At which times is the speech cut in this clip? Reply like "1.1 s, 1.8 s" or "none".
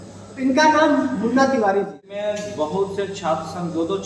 2.3 s